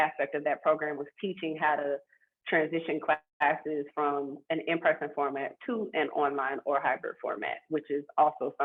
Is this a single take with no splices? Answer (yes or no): yes